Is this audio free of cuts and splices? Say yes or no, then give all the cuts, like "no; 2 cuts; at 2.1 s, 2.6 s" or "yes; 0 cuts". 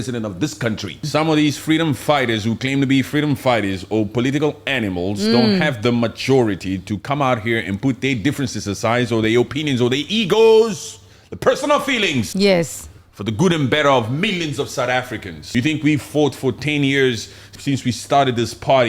no; 4 cuts; at 1.0 s, 12.3 s, 15.4 s, 17.5 s